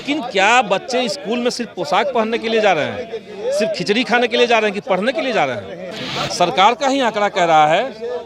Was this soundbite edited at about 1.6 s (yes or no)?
no